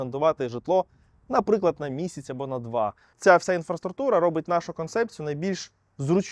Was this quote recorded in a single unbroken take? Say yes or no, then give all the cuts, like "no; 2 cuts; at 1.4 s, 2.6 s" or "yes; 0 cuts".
no; 1 cut; at 3.1 s